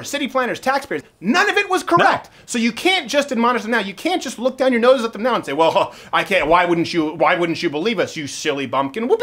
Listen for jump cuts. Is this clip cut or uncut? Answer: cut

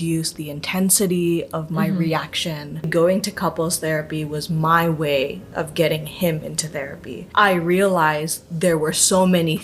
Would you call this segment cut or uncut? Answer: cut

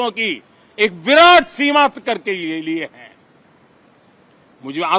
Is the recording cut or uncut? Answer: uncut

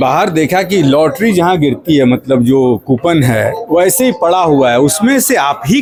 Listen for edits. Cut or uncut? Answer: uncut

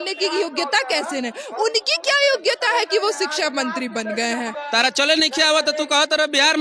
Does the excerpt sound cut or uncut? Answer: cut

